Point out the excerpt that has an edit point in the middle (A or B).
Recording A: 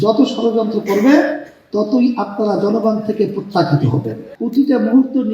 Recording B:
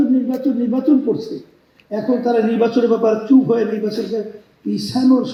A